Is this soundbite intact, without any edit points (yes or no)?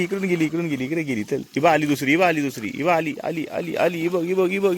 yes